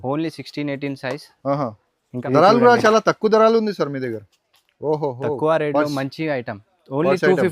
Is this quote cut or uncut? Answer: cut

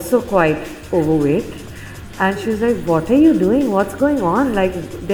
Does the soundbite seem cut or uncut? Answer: uncut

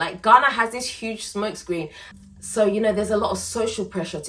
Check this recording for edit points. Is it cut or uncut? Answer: cut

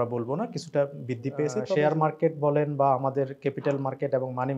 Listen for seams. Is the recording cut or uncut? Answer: cut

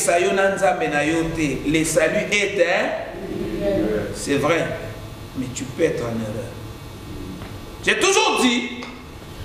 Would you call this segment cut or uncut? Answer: uncut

